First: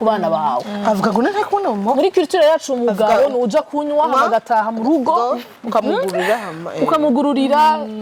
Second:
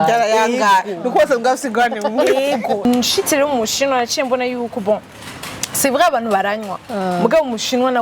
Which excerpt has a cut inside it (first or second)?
second